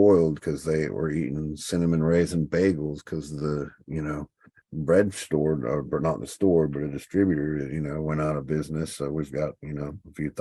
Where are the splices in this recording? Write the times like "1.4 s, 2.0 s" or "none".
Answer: none